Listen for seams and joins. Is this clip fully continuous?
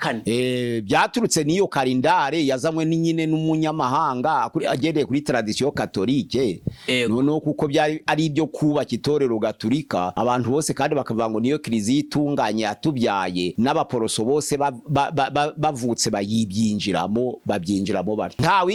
yes; 0 cuts

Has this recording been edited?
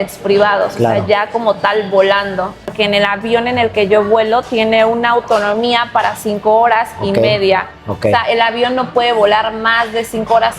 yes; 1 cut; at 2.7 s

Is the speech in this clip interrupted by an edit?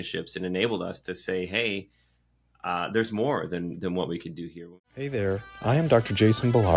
yes; 1 cut; at 4.6 s

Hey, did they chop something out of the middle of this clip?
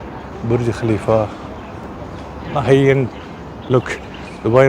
no; 0 cuts

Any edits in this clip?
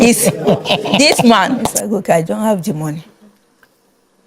yes; 1 cut; at 1.7 s

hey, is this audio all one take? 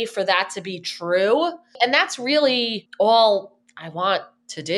no; 2 cuts; at 1.8 s, 2.8 s

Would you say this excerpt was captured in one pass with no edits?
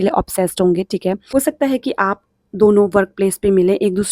no; 1 cut; at 1.2 s

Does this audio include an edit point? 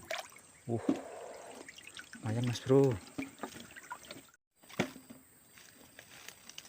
yes; 1 cut; at 4.3 s

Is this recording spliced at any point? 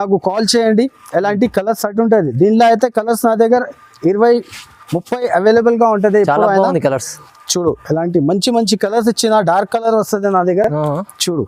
no; 0 cuts

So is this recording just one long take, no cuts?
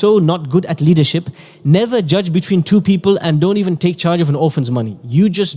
yes; 0 cuts

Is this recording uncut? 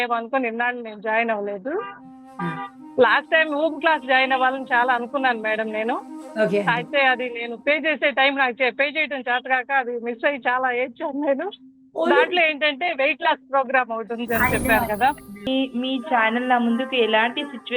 no; 1 cut; at 15.5 s

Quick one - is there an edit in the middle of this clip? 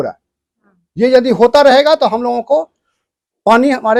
no; 0 cuts

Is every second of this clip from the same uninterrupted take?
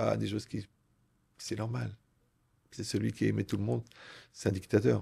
yes; 0 cuts

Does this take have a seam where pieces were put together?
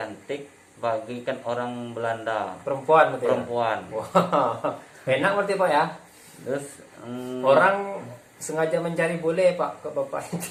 no; 0 cuts

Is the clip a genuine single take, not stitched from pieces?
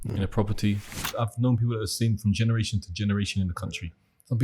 no; 1 cut; at 1.1 s

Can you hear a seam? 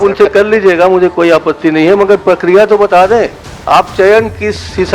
no; 0 cuts

